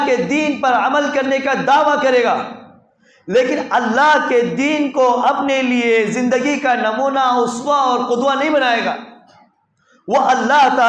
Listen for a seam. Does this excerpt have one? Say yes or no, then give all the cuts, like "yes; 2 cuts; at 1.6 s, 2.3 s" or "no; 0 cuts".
no; 0 cuts